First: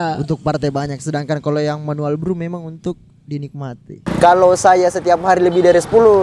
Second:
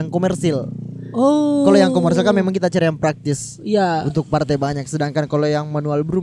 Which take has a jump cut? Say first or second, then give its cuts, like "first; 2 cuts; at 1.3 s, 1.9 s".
first; 1 cut; at 4.1 s